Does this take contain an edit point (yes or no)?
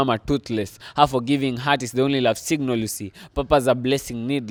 no